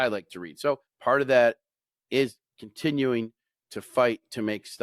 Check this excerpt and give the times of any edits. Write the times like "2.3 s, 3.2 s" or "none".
0.9 s